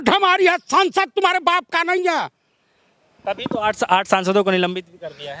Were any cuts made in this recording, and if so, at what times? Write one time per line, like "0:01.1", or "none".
none